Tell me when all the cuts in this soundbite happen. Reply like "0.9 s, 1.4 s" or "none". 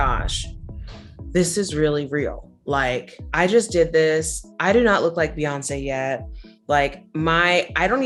none